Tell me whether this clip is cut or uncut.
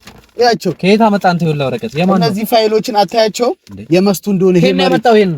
cut